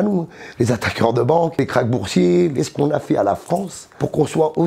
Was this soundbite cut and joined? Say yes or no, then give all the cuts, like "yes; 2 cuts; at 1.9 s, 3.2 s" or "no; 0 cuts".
yes; 1 cut; at 1.6 s